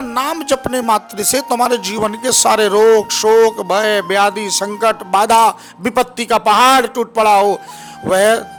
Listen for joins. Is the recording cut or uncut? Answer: uncut